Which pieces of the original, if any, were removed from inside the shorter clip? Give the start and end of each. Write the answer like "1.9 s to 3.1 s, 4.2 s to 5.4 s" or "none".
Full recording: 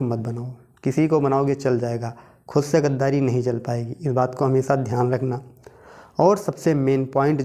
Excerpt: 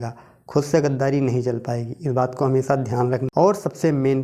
5.3 s to 6.1 s